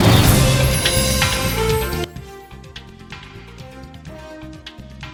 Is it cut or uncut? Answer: uncut